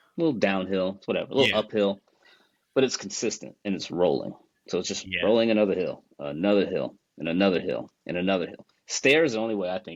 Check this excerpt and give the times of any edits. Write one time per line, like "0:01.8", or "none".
none